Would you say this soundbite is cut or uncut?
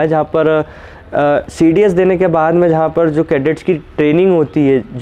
uncut